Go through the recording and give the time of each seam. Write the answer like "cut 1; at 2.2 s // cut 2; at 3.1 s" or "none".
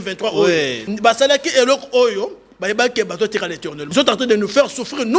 cut 1; at 0.9 s // cut 2; at 3.8 s

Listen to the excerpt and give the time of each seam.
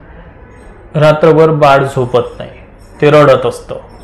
none

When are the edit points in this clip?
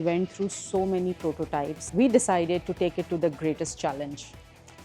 cut 1; at 1.8 s

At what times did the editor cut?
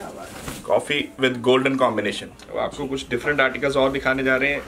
cut 1; at 2.4 s

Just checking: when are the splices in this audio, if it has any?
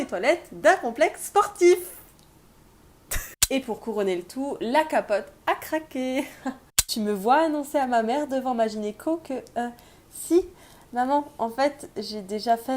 cut 1; at 3.3 s // cut 2; at 6.7 s

